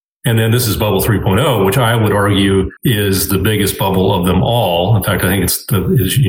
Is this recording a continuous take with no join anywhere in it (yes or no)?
yes